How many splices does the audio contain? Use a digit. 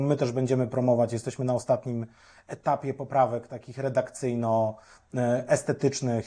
0